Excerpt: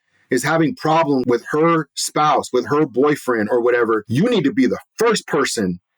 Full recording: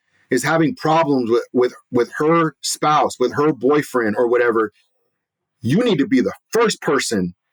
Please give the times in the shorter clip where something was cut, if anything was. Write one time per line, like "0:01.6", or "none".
0:01.2
0:04.1